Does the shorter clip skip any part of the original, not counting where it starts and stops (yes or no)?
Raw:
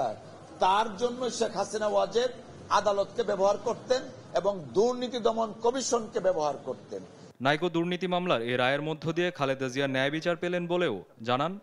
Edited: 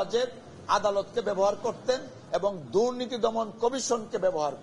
no